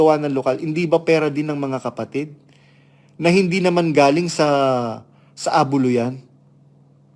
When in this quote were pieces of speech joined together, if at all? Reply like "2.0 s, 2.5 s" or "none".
none